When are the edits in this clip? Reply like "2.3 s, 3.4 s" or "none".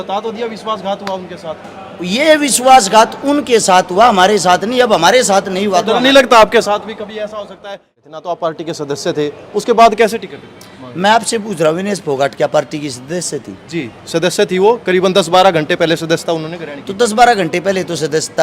7.6 s

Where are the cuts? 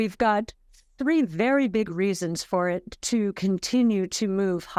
none

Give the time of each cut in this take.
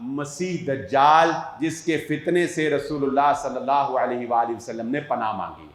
none

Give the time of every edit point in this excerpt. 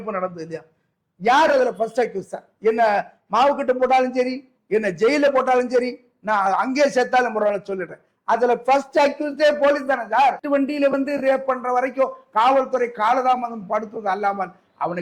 10.4 s

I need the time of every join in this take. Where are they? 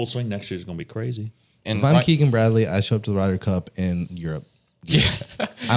1.6 s

